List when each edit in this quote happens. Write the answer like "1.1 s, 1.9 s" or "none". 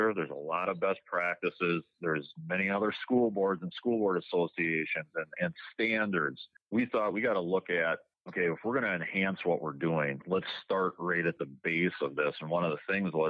none